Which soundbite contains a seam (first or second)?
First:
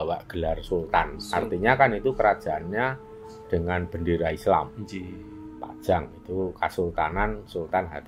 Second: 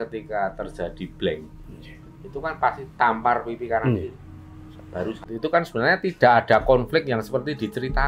second